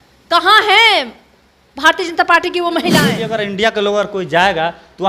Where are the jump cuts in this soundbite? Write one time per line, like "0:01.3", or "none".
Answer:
0:03.2